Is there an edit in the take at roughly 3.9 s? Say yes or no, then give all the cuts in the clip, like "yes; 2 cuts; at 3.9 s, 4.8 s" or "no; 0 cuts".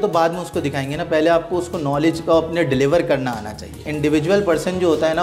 yes; 1 cut; at 3.9 s